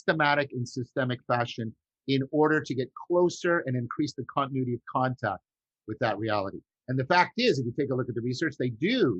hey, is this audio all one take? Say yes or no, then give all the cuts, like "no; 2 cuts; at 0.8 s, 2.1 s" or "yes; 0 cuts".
yes; 0 cuts